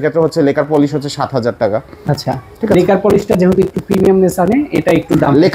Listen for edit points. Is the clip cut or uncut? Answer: uncut